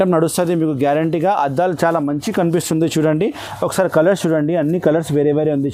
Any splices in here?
no; 0 cuts

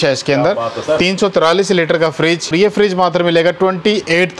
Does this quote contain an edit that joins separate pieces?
yes; 1 cut; at 2.5 s

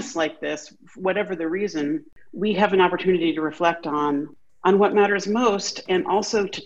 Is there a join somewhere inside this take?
yes; 2 cuts; at 2.2 s, 4.4 s

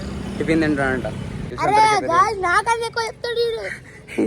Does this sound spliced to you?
yes; 1 cut; at 1.5 s

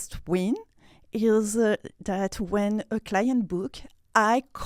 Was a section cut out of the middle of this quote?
no; 0 cuts

